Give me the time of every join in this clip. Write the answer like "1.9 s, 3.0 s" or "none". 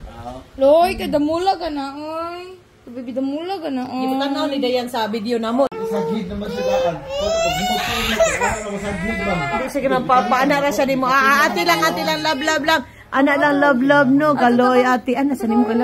5.8 s